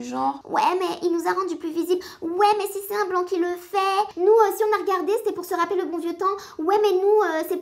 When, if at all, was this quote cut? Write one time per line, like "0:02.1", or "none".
0:04.1